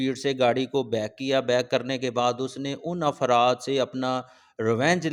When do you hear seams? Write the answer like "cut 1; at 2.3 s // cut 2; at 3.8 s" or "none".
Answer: none